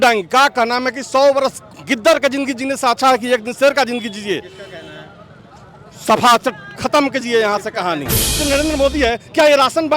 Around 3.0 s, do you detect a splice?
no; 1 cut; at 8.4 s

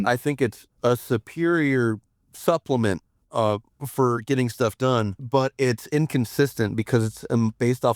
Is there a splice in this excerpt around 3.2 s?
no; 1 cut; at 5.2 s

